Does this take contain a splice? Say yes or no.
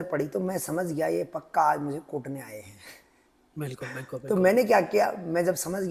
no